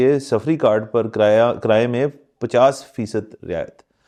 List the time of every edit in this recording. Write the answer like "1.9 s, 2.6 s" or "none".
none